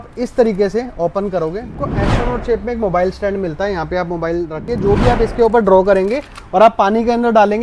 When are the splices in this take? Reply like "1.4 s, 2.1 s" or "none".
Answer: 1.9 s, 4.7 s